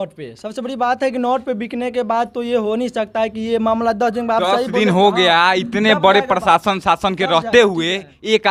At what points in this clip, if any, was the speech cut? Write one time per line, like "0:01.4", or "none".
none